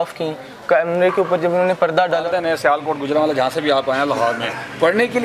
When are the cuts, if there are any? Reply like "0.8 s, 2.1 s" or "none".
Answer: 2.5 s